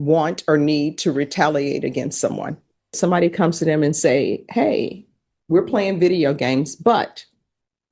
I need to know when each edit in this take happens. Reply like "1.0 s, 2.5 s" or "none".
3.0 s